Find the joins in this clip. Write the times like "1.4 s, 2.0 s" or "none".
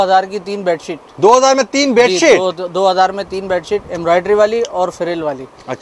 none